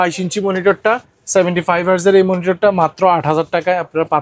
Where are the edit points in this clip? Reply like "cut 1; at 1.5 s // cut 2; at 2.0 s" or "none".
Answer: none